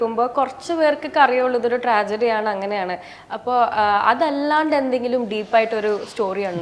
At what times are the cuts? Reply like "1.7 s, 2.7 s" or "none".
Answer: none

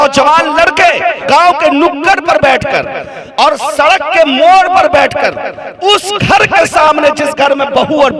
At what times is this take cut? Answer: 1.2 s

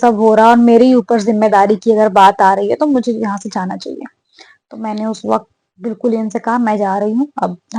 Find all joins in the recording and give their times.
none

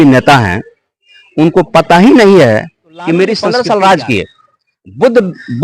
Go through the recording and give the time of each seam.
3.5 s

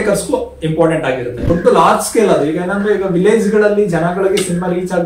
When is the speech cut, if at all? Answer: 1.5 s

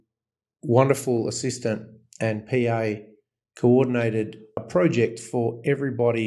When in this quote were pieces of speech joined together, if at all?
4.6 s

